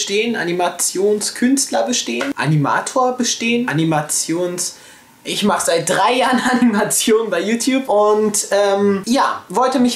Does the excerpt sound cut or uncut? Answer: uncut